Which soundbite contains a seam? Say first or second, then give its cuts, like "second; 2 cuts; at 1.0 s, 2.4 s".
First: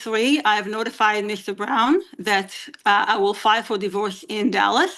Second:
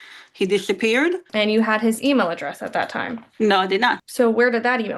second; 2 cuts; at 1.2 s, 4.0 s